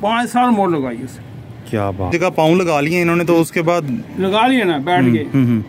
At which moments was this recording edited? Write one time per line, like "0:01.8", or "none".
0:02.1

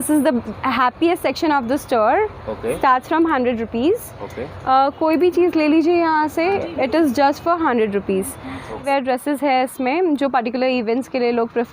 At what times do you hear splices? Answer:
0:08.8

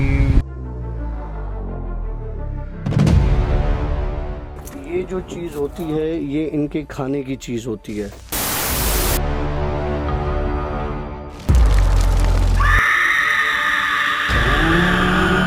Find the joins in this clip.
none

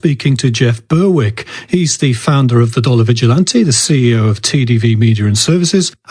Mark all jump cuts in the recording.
0:04.2

